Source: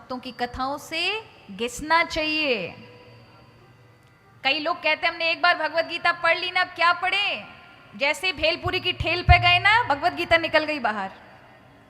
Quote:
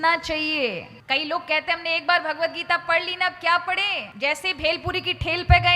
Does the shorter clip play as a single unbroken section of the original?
no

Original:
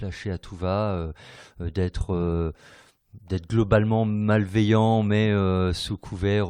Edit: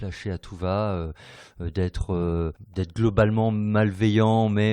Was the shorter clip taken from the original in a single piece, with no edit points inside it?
no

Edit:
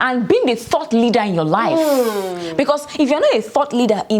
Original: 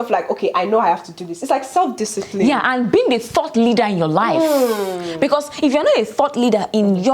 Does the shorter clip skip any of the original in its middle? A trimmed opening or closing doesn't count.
no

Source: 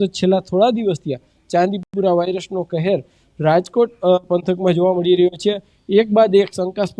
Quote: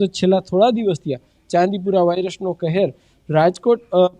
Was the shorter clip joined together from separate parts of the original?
yes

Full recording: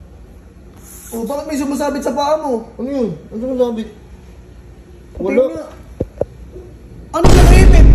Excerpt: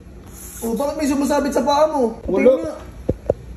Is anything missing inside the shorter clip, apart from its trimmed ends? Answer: yes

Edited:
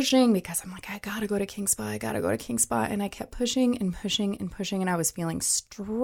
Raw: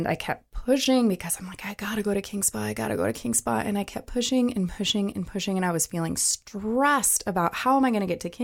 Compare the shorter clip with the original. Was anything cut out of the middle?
no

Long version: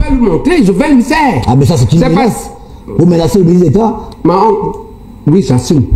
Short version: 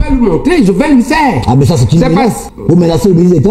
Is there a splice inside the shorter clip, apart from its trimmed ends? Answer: yes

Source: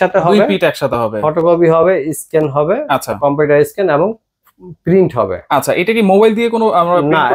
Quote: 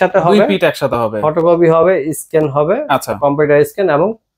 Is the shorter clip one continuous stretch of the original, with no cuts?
yes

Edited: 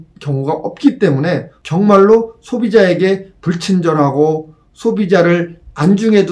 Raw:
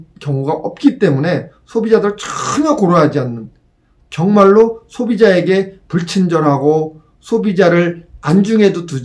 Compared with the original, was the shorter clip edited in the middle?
yes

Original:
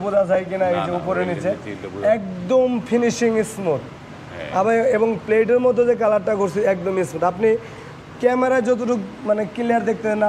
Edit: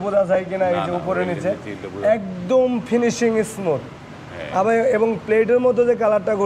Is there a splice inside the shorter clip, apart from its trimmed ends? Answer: no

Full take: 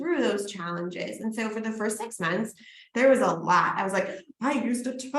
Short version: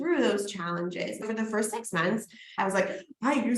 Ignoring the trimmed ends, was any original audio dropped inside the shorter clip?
yes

